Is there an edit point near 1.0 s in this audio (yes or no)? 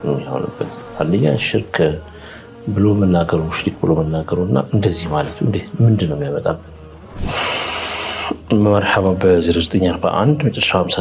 no